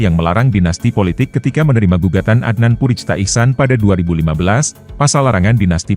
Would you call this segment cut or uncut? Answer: uncut